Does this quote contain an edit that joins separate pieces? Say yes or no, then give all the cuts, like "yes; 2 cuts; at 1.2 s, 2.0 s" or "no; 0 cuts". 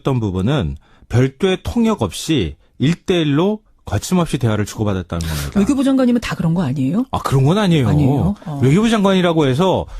yes; 1 cut; at 4.5 s